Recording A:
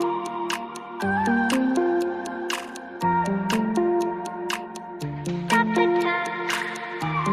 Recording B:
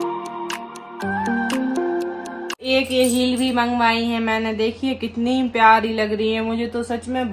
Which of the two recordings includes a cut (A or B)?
B